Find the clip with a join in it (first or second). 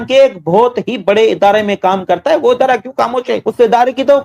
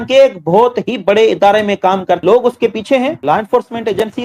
second